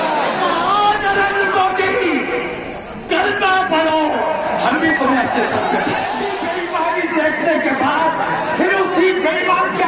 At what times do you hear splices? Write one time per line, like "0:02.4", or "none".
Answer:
0:06.4